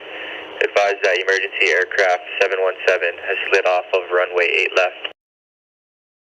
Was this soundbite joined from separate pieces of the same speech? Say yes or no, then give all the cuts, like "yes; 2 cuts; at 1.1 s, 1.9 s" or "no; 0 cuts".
no; 0 cuts